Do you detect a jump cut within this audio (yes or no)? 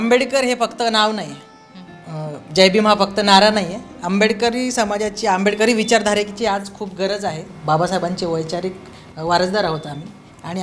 yes